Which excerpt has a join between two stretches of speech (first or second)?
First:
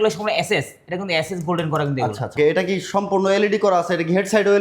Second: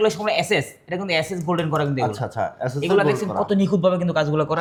first